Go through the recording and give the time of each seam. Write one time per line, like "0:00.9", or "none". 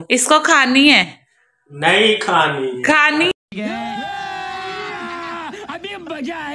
0:03.3